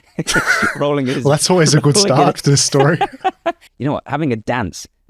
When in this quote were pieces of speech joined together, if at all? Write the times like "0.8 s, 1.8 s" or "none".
3.7 s